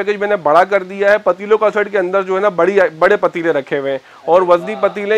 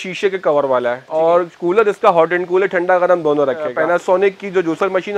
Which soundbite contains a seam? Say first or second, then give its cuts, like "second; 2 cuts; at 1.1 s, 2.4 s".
second; 2 cuts; at 1.0 s, 3.7 s